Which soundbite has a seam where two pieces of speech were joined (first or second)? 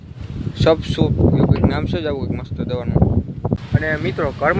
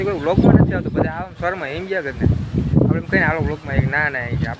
first